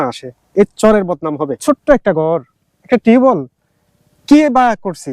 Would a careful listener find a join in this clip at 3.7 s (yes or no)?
no